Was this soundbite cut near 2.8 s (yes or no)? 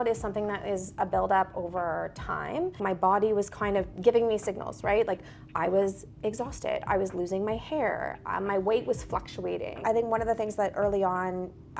yes